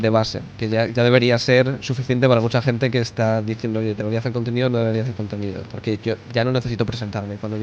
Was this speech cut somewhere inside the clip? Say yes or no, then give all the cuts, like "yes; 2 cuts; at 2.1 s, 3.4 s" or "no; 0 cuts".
no; 0 cuts